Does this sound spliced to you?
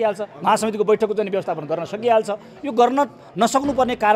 no; 0 cuts

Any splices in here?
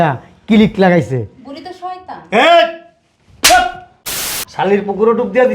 yes; 1 cut; at 4.0 s

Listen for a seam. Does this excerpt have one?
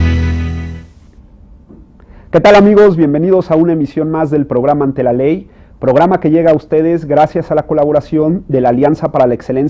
no; 0 cuts

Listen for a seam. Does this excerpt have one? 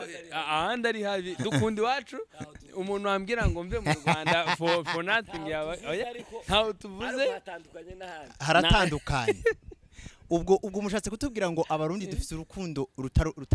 no; 0 cuts

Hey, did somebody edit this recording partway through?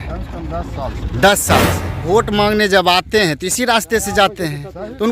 yes; 1 cut; at 2.0 s

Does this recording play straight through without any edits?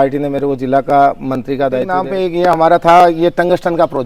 no; 1 cut; at 2.0 s

